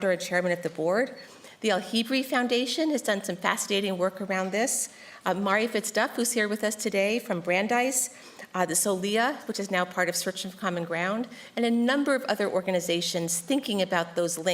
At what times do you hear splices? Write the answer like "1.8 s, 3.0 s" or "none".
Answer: 3.2 s